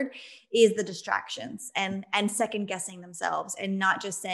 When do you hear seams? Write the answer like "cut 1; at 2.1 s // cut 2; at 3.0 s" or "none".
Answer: none